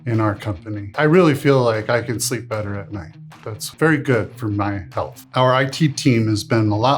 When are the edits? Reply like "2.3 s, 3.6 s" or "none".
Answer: 0.9 s, 3.6 s, 5.2 s